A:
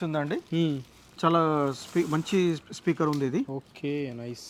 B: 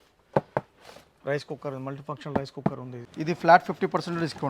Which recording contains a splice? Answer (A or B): B